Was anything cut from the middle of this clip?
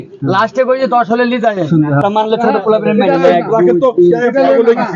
yes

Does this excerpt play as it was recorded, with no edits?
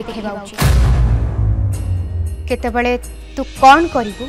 no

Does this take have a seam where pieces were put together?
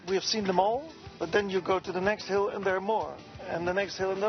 no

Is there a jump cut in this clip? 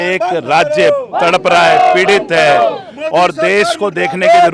no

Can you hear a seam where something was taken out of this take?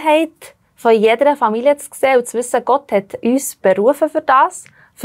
yes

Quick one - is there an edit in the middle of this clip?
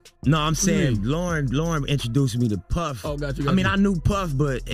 no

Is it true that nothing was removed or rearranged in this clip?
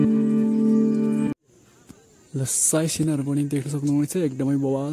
no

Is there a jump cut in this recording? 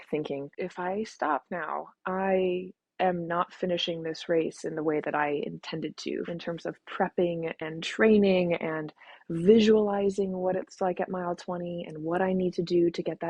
no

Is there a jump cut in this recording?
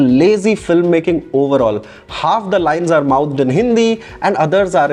no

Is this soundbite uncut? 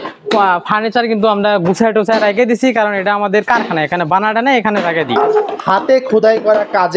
no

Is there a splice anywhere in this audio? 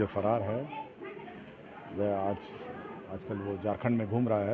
no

